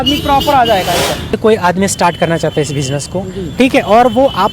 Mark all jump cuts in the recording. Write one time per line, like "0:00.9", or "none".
0:01.4